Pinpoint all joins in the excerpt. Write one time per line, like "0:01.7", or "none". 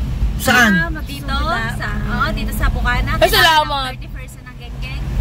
none